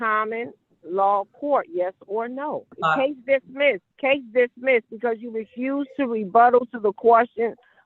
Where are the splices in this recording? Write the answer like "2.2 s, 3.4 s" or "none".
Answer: 2.7 s, 3.9 s